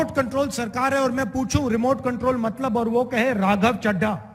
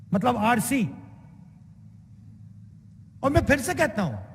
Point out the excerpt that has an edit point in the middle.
second; 1 cut; at 2.7 s

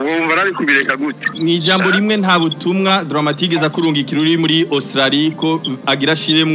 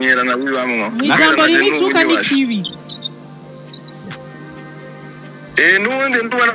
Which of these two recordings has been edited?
first; 1 cut; at 1.3 s

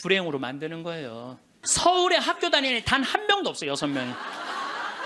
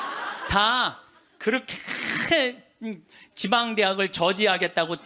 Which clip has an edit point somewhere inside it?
first; 1 cut; at 1.6 s

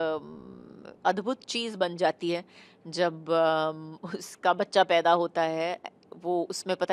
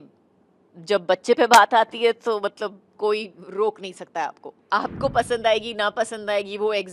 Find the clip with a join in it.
second; 1 cut; at 4.6 s

